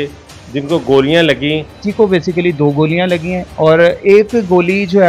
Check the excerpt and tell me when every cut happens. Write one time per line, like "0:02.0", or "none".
0:01.8
0:03.5